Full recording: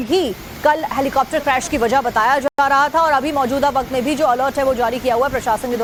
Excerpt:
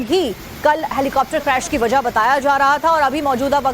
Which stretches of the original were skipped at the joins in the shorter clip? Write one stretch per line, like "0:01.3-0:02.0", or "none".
0:02.4-0:02.6